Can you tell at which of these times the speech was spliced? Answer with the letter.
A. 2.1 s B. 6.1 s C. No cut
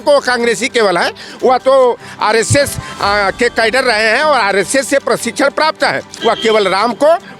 B